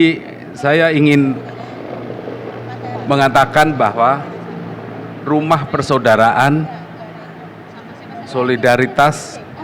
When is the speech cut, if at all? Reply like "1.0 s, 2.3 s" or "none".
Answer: none